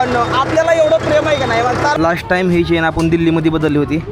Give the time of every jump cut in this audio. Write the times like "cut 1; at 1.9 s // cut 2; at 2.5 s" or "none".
cut 1; at 1.9 s